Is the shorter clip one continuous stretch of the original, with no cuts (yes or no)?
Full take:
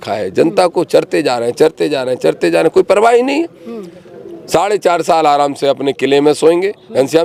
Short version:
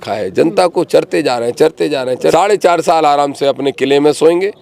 no